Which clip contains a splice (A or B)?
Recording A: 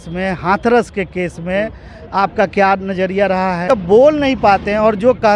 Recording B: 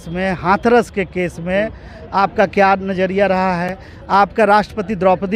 A